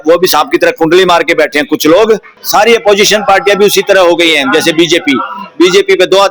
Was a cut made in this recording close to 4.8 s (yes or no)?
no